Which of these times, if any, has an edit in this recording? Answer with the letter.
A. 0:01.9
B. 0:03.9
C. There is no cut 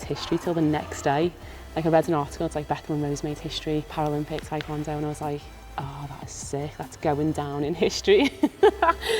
B